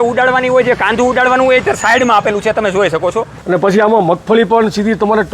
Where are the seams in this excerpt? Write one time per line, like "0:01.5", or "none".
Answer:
0:03.4